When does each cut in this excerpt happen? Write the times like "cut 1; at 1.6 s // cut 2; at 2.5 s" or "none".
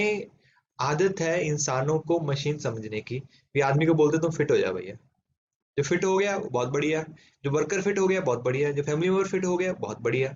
none